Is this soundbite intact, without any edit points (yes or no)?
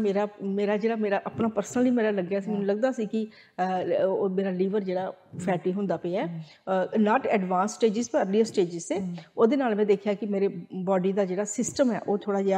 yes